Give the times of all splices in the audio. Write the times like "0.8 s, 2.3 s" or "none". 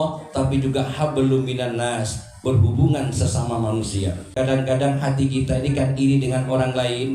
4.3 s

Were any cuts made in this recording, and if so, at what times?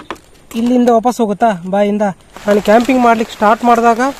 2.3 s

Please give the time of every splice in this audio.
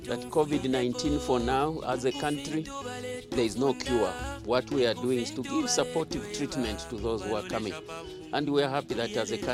none

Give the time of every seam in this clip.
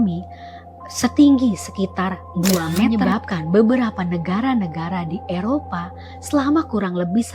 2.8 s

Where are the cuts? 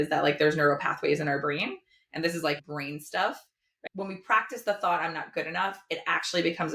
2.6 s, 3.8 s

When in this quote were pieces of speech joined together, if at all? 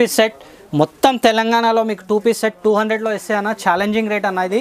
none

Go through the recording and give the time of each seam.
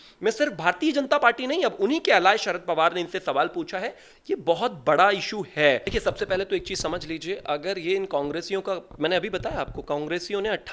5.9 s

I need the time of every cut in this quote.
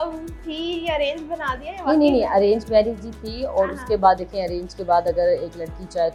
none

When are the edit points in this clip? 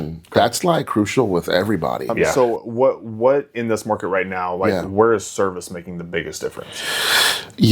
2.3 s

